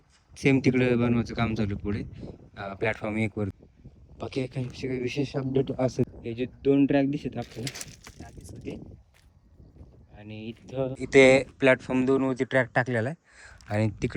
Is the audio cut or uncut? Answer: cut